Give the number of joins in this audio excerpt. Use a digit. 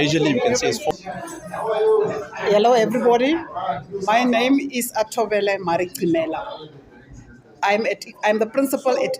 1